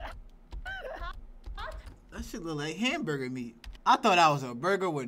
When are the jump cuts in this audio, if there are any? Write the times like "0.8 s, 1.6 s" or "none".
3.6 s